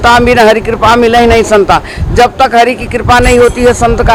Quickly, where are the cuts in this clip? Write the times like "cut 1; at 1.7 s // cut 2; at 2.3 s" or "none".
none